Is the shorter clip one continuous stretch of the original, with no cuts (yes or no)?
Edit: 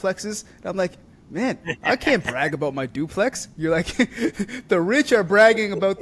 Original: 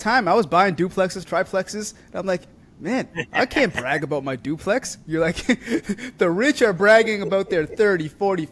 yes